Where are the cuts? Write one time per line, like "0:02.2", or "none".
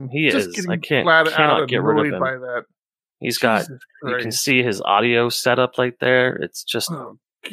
none